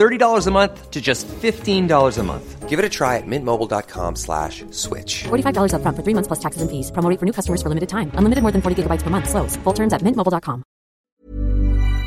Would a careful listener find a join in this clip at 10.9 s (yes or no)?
yes